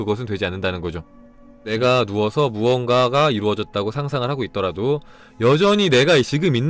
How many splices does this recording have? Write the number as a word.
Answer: one